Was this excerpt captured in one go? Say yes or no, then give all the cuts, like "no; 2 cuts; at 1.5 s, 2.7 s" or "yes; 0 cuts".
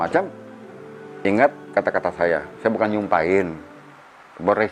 yes; 0 cuts